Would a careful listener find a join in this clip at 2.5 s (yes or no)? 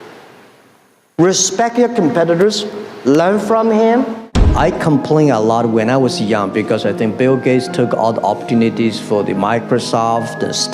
no